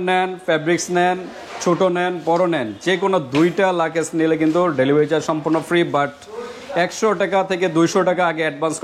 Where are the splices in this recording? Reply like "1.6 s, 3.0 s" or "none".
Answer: none